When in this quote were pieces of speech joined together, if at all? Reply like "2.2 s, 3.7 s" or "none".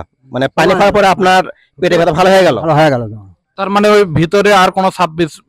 3.6 s